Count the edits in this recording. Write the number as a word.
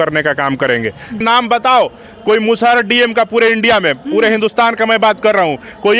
one